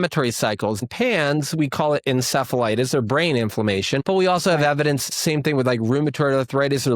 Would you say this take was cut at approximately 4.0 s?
yes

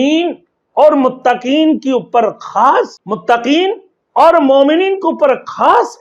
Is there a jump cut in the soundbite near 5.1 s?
no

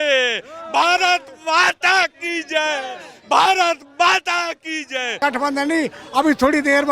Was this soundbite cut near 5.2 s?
yes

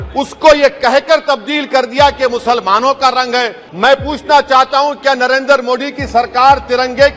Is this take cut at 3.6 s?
yes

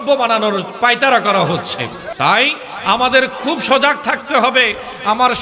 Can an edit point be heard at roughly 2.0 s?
yes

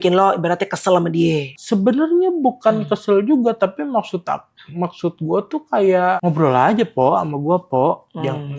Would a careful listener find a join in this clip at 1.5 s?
yes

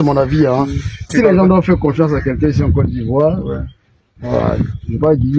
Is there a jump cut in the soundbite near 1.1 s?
yes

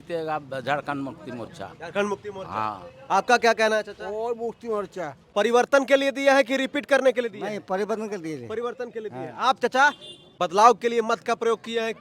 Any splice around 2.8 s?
no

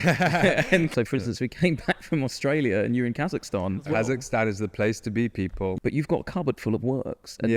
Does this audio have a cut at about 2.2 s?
no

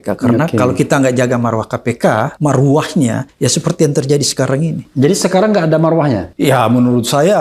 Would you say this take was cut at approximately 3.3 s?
yes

